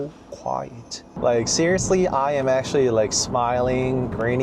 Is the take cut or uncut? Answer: cut